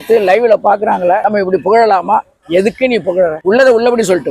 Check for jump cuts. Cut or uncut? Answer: cut